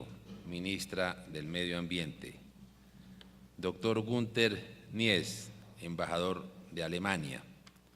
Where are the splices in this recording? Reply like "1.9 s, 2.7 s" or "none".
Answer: none